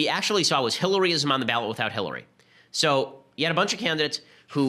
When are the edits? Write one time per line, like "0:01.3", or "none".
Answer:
none